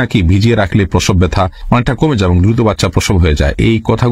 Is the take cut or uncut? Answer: uncut